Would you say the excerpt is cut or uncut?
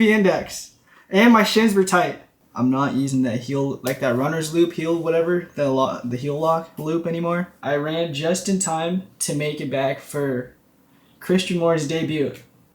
cut